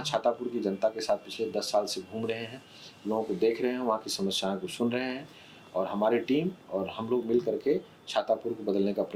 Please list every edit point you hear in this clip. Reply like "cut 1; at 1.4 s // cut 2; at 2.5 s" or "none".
none